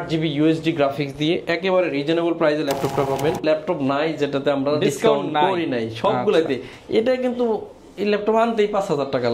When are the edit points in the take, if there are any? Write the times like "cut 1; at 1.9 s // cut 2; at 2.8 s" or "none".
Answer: cut 1; at 3.4 s